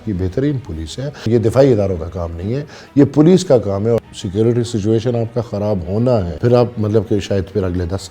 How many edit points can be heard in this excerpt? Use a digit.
3